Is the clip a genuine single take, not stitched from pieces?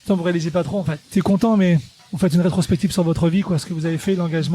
no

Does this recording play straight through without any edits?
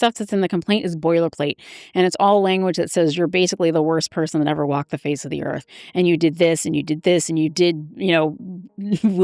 yes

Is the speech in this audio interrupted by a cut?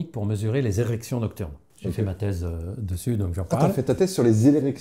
no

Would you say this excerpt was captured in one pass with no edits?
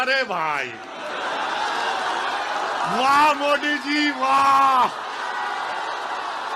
yes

